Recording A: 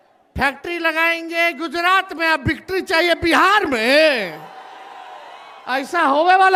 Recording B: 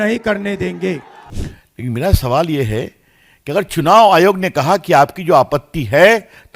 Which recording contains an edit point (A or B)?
B